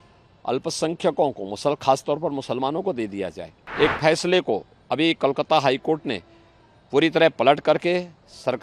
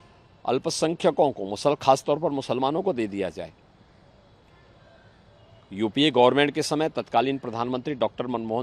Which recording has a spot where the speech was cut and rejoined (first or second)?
first